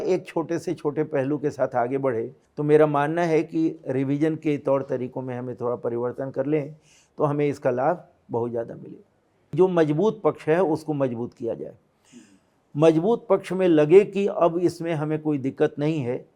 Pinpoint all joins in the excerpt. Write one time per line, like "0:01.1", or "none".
0:02.4
0:09.5